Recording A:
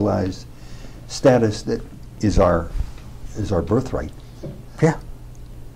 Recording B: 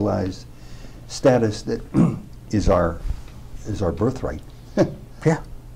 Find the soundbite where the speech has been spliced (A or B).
A